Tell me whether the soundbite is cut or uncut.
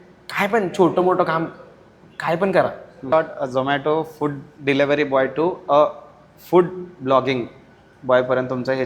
cut